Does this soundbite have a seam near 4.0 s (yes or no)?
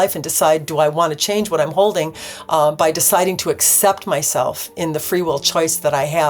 no